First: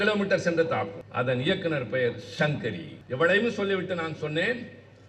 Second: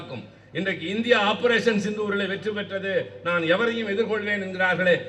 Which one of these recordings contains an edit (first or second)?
first